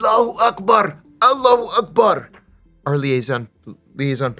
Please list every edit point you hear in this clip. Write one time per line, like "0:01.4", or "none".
0:02.5

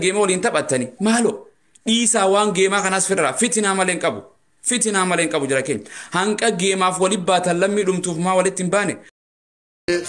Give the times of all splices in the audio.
0:09.1

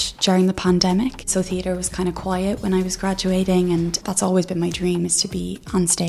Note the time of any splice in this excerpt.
0:01.3
0:04.0

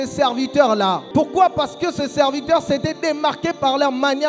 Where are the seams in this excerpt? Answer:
0:01.0

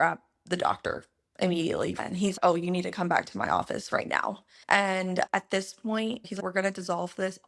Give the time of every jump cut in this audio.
0:02.0
0:05.3

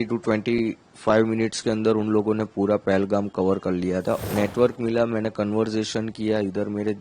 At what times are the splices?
0:04.2

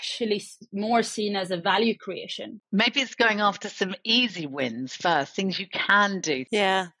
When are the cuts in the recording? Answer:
0:02.6

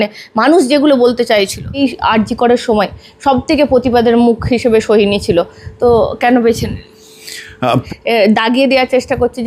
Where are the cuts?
0:01.8
0:07.9

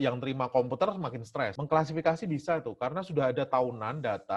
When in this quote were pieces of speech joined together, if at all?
0:01.6

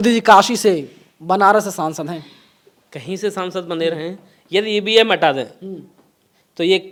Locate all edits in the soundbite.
none

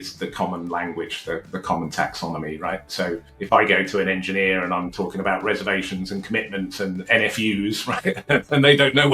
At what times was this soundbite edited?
0:03.3

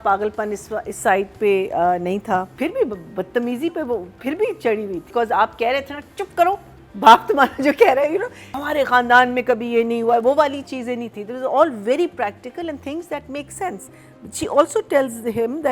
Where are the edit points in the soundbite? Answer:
0:02.5
0:05.1
0:08.6

